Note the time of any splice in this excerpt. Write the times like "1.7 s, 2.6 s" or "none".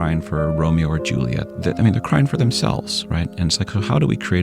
1.5 s